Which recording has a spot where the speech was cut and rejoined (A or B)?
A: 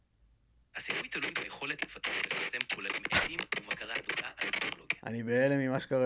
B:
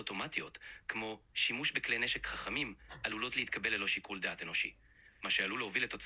A